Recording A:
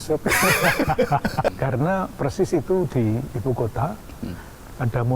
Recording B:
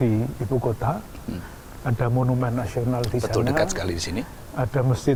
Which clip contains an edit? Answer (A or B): A